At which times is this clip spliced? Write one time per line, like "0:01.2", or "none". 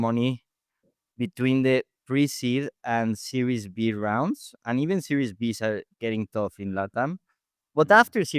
none